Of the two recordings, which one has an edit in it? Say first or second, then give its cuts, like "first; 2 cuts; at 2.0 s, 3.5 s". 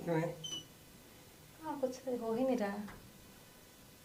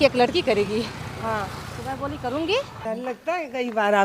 second; 1 cut; at 2.8 s